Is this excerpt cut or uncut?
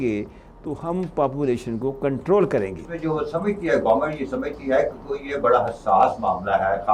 cut